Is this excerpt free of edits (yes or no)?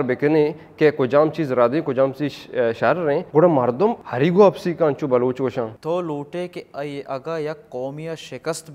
no